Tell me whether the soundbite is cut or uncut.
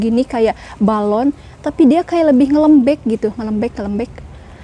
uncut